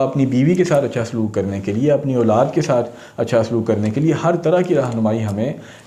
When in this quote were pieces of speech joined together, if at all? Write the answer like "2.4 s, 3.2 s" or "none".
none